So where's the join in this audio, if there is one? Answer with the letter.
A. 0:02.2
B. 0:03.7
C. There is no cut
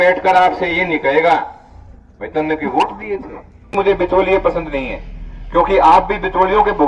B